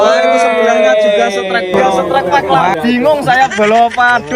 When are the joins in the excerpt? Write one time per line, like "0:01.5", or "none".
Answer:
0:01.8